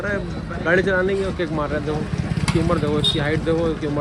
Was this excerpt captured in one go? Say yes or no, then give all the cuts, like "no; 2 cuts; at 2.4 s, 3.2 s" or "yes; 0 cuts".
yes; 0 cuts